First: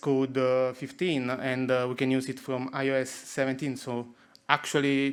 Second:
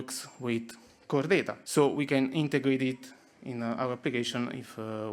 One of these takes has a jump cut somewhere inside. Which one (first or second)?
second